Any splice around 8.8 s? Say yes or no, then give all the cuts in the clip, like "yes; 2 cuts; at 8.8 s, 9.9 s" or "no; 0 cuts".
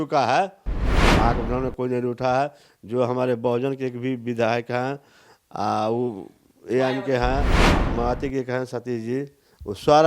no; 1 cut; at 1.0 s